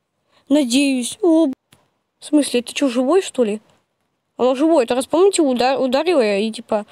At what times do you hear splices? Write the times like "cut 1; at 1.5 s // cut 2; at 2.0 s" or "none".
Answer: cut 1; at 1.5 s